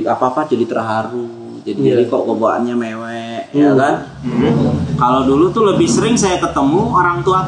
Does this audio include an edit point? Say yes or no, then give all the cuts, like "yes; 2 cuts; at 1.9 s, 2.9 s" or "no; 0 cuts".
yes; 1 cut; at 4.2 s